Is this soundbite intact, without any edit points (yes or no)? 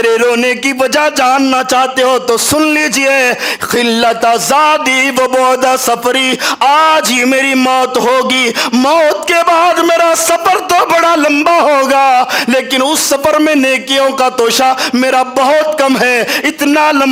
yes